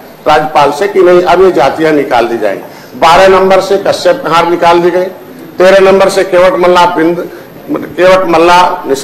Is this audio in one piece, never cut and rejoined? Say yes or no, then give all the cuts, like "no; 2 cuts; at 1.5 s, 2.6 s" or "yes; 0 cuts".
yes; 0 cuts